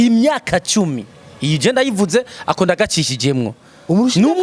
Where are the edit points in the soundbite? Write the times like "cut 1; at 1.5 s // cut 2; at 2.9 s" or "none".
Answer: none